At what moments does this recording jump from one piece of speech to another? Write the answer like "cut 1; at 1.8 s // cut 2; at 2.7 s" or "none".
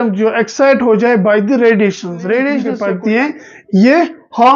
cut 1; at 2.7 s